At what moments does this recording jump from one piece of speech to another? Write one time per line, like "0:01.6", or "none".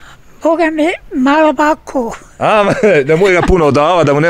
none

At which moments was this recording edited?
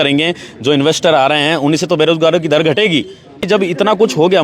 0:03.4

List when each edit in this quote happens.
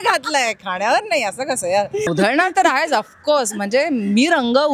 0:02.1

